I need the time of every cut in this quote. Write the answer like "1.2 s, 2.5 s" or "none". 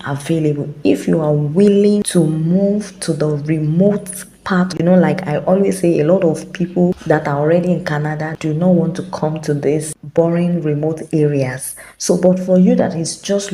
2.1 s, 4.7 s, 7.0 s, 8.3 s